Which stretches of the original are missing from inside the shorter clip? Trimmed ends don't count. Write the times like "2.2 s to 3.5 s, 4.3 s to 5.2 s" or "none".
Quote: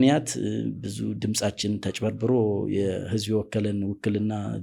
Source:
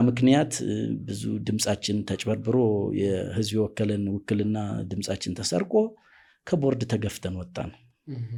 none